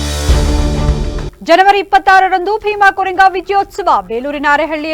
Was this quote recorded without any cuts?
no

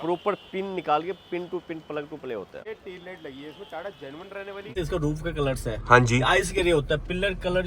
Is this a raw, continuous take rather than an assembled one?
no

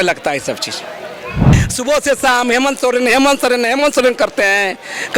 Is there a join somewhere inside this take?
yes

